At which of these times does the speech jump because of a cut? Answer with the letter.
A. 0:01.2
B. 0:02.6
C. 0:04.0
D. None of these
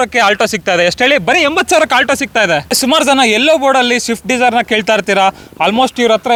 D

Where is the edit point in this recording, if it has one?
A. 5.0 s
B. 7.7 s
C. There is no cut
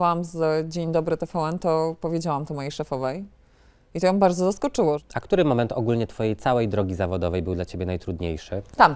A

